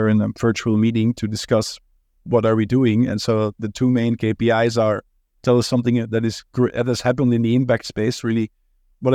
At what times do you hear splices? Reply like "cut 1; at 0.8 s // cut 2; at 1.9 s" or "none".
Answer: none